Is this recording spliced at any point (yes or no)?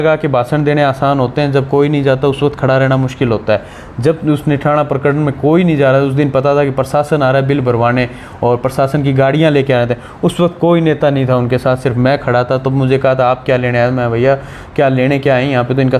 no